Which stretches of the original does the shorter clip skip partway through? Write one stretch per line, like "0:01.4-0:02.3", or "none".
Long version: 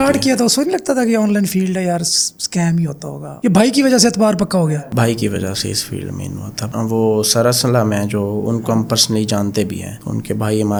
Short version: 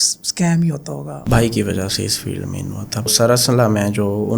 0:03.3-0:04.8
0:06.7-0:07.2